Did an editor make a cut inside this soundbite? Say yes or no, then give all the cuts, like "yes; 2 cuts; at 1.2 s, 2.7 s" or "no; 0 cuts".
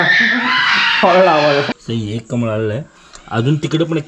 yes; 1 cut; at 1.7 s